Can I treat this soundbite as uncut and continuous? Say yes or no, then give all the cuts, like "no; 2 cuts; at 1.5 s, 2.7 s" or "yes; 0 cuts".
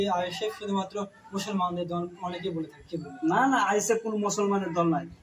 yes; 0 cuts